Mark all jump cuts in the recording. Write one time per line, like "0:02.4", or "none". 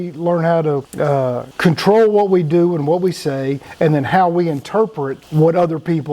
0:01.5
0:03.6
0:05.2